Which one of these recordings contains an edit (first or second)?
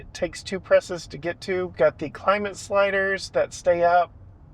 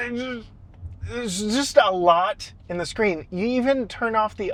first